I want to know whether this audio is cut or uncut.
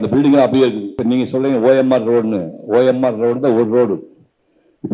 cut